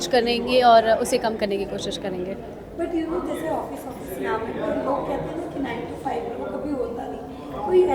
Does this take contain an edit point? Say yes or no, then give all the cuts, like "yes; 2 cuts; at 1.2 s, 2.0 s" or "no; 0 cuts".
no; 0 cuts